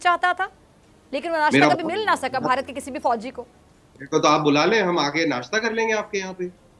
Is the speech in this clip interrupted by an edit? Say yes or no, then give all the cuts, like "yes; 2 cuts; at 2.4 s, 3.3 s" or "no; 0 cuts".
no; 0 cuts